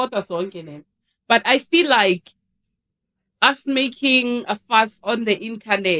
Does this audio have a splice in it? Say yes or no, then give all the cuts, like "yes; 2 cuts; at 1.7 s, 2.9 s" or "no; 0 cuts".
no; 0 cuts